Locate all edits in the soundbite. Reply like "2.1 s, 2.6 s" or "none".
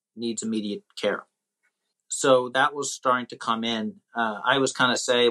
none